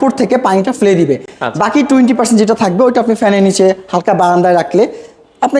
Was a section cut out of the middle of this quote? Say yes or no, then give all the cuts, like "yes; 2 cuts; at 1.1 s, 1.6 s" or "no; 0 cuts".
no; 0 cuts